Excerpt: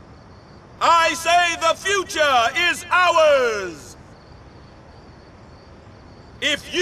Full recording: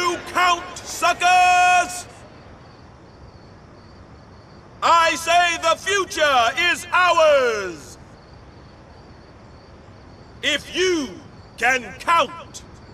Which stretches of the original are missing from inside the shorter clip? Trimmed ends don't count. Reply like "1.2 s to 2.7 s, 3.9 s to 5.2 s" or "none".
none